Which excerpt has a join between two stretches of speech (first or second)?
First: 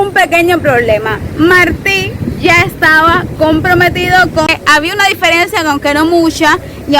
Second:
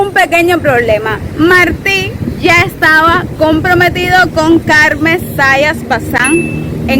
first